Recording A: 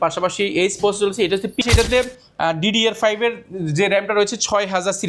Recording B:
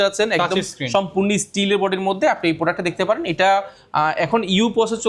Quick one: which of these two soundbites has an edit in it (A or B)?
A